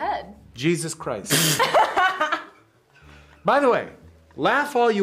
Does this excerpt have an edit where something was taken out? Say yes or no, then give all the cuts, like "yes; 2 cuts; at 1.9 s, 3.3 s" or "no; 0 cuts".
no; 0 cuts